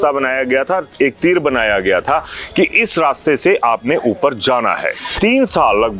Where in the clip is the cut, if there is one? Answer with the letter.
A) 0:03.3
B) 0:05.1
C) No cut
B